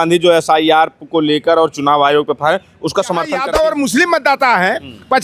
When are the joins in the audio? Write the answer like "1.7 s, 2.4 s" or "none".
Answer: 3.3 s